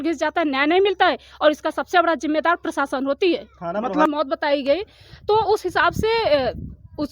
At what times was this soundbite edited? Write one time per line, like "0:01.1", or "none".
0:04.1

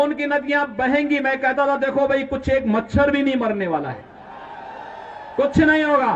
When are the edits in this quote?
none

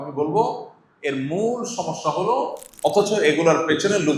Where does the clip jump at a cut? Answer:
0:02.6

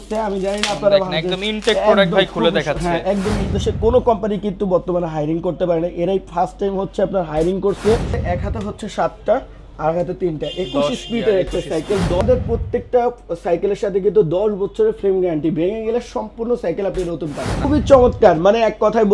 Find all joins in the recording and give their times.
0:03.5
0:08.1
0:12.2
0:17.6

